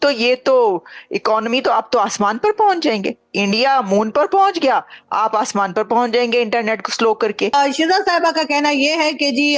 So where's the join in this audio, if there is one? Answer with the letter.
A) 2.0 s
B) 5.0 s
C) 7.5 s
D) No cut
C